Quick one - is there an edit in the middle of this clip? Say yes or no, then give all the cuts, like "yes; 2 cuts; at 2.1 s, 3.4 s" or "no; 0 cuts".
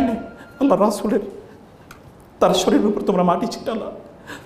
no; 0 cuts